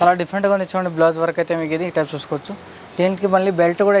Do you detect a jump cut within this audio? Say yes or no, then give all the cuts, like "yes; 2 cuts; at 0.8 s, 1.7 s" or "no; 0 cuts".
no; 0 cuts